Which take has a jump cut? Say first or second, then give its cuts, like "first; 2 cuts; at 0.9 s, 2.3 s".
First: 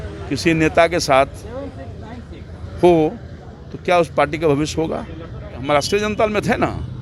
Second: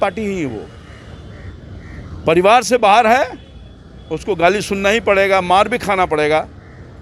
first; 1 cut; at 5.6 s